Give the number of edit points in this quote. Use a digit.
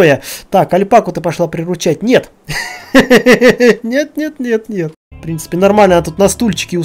1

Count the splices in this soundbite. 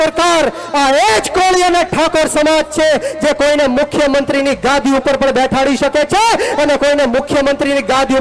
0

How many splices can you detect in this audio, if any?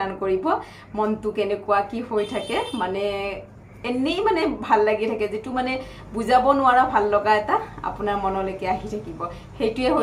0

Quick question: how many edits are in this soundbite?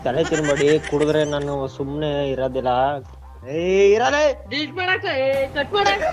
0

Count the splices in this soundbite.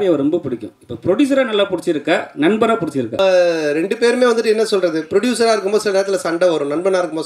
1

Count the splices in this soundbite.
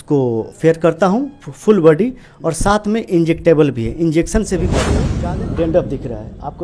1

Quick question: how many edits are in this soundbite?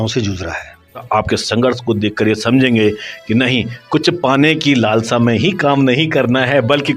1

